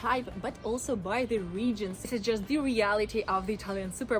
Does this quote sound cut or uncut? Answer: cut